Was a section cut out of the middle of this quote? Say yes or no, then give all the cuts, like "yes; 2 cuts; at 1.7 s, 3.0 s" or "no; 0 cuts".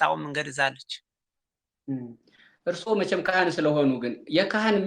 no; 0 cuts